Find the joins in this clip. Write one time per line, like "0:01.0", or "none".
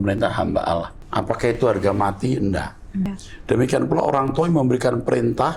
0:01.0
0:03.2